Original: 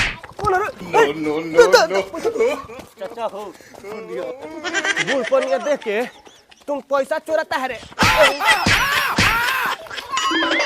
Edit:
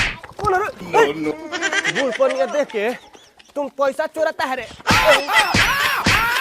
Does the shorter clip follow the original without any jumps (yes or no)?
no